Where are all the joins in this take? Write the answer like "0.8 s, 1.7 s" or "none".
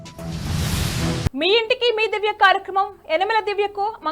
1.3 s